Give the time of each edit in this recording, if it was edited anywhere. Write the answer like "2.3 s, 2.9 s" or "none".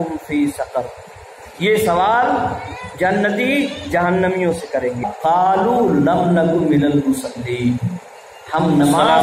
5.0 s